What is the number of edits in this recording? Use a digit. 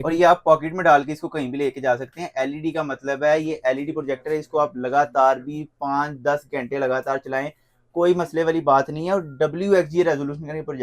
0